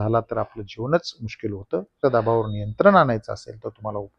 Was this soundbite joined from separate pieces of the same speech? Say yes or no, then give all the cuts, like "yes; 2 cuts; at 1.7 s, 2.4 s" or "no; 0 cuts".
yes; 1 cut; at 2.0 s